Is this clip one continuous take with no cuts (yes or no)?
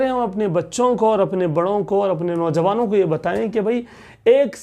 yes